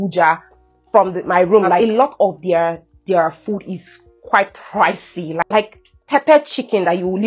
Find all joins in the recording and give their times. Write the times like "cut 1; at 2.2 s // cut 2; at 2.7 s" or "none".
cut 1; at 1.8 s // cut 2; at 5.4 s